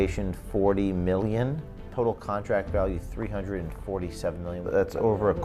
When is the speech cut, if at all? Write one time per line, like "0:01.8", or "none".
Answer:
0:01.8
0:04.6